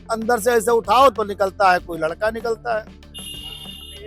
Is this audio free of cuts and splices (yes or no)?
yes